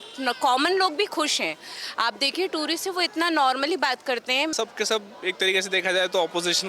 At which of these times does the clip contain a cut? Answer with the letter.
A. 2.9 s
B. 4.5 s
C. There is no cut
B